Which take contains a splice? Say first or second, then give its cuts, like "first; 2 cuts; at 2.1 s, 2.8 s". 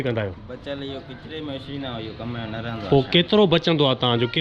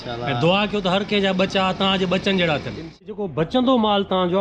second; 1 cut; at 3.1 s